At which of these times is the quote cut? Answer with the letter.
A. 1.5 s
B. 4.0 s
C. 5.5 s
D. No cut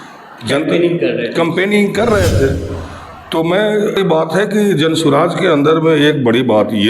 B